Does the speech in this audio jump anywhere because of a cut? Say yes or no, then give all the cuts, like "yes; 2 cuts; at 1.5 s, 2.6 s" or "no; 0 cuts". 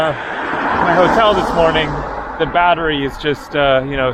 no; 0 cuts